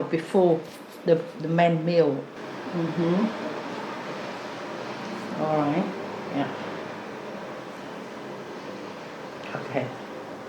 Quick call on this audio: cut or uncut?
cut